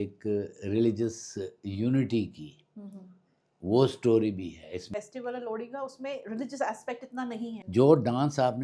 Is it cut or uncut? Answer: cut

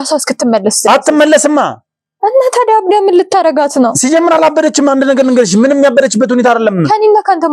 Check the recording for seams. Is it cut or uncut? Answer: uncut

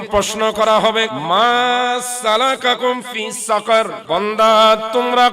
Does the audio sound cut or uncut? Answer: cut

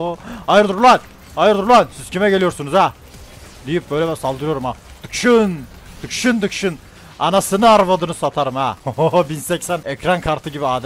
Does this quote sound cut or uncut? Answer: cut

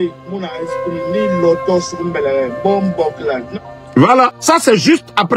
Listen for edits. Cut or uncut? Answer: cut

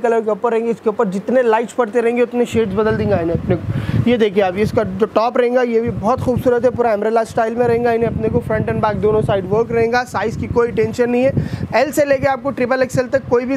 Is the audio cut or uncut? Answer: uncut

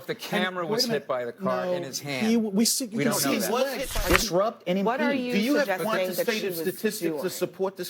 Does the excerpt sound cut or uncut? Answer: cut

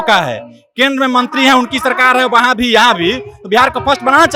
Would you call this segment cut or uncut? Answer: uncut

